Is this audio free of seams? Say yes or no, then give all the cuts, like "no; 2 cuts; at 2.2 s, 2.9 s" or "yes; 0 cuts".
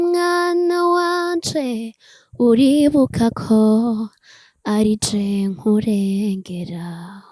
yes; 0 cuts